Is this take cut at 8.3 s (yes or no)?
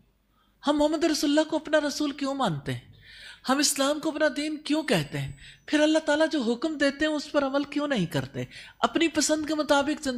no